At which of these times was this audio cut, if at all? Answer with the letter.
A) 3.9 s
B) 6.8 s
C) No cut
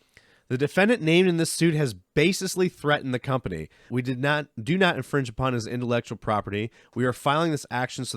A